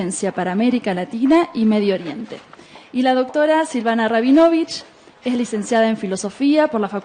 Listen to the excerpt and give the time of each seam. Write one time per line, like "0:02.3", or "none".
0:05.6